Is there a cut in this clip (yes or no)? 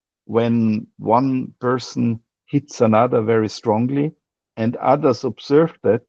no